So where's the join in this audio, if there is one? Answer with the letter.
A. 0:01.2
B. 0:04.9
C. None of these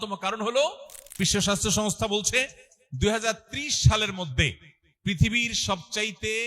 A